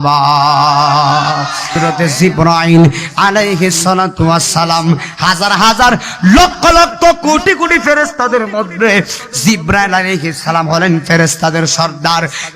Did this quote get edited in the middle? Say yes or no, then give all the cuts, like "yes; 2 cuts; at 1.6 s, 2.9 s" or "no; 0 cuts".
yes; 1 cut; at 1.8 s